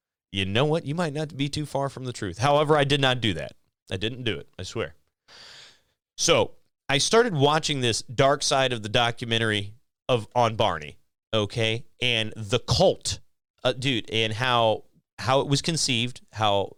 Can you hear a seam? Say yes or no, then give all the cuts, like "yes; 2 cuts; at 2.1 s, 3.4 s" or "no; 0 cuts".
no; 0 cuts